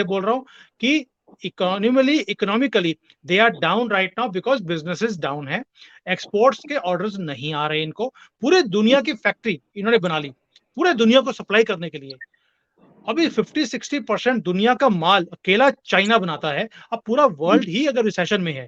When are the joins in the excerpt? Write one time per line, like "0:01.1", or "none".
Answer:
none